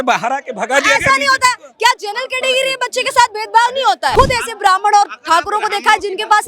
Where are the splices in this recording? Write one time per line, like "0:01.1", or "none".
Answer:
0:04.1